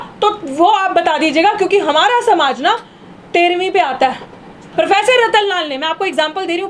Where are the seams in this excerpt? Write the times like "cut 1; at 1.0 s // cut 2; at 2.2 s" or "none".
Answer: cut 1; at 4.6 s